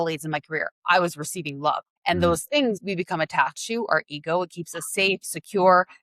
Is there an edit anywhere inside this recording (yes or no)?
yes